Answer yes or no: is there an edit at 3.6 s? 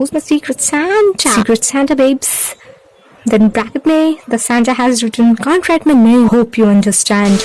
no